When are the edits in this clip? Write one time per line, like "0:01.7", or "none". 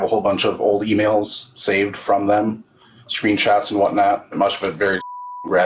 0:04.3